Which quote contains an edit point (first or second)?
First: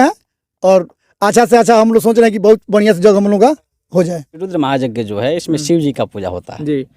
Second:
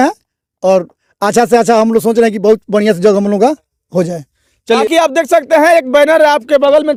first